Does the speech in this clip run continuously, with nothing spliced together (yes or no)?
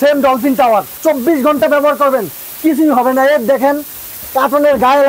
no